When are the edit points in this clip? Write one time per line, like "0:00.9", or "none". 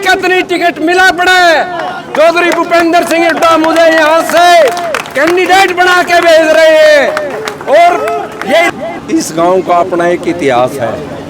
0:08.7